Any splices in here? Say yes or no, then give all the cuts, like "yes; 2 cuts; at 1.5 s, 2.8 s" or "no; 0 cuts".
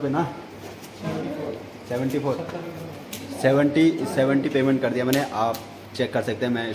no; 0 cuts